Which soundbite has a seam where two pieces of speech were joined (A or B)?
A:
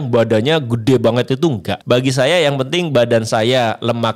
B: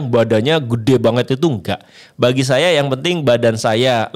A